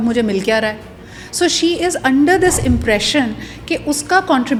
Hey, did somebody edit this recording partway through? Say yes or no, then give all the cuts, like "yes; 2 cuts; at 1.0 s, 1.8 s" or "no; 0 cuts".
no; 0 cuts